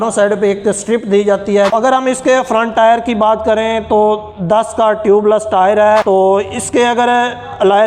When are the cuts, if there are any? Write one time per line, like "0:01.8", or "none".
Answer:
0:01.7